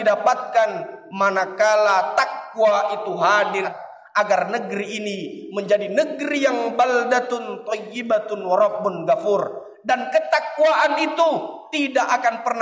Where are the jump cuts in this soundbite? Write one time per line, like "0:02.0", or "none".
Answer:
0:03.8